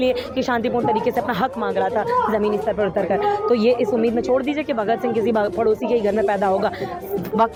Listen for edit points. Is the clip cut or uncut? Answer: uncut